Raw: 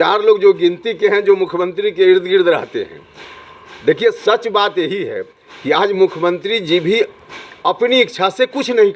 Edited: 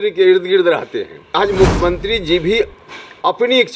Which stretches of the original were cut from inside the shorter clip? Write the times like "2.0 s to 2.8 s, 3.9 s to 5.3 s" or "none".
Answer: 3.2 s to 5.8 s